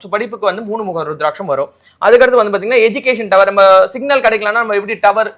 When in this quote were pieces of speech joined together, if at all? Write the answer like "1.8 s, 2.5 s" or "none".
none